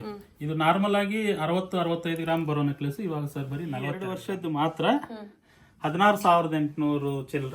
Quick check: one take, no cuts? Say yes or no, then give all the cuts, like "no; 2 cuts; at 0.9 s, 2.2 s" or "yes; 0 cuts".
no; 1 cut; at 4.1 s